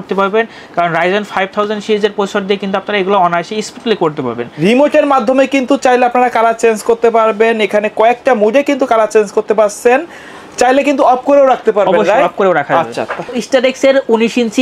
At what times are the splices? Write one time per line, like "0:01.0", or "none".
0:04.6
0:13.4